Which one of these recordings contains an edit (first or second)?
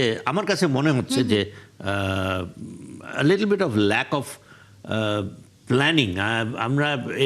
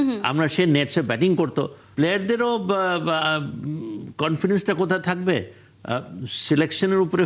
second